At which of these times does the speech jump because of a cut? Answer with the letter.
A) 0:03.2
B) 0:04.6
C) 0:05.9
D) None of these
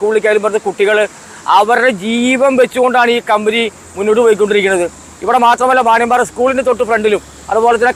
D